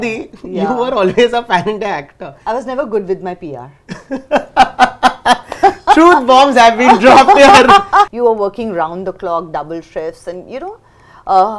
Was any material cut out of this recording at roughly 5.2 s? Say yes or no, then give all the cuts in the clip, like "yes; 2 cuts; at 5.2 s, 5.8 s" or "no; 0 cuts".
no; 1 cut; at 8.1 s